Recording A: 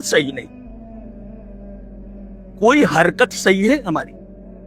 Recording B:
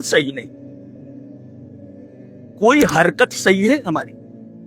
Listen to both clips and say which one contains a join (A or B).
B